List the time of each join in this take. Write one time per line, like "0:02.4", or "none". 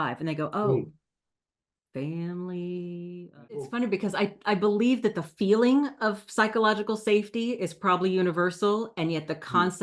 0:03.7